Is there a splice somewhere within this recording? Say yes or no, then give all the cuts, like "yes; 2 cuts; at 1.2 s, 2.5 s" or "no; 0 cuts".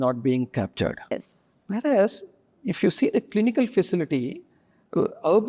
yes; 1 cut; at 1.2 s